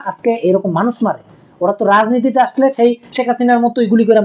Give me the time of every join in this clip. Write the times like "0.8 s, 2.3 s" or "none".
none